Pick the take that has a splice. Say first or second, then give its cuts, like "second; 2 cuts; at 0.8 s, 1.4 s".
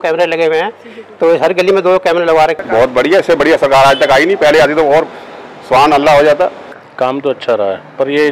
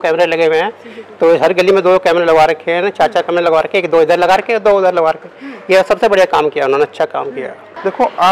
first; 2 cuts; at 2.6 s, 6.7 s